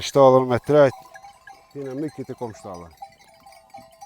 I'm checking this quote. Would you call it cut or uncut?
uncut